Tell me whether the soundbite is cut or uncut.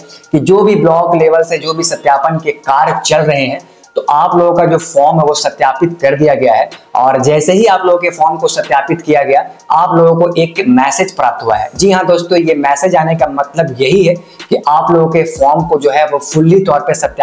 uncut